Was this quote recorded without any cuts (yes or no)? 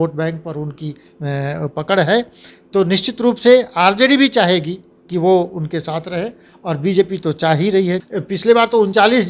no